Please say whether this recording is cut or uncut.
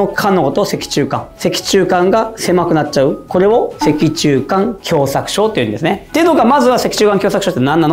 uncut